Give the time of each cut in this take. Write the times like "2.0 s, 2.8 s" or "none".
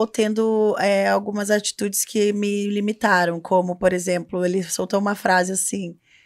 none